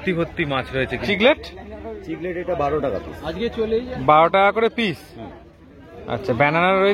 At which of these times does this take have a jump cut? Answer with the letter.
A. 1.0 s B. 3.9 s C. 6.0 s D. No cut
A